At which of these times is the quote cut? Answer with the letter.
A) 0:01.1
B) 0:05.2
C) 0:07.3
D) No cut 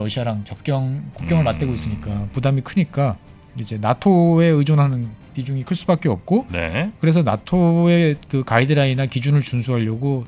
D